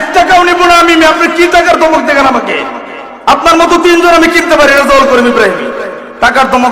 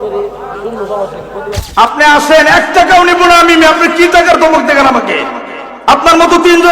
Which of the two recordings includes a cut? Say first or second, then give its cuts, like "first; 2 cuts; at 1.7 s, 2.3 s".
second; 1 cut; at 1.6 s